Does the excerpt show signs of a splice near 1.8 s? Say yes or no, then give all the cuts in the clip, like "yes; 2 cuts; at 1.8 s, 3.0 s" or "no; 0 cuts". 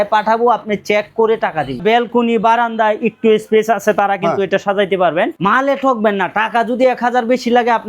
yes; 2 cuts; at 1.8 s, 5.4 s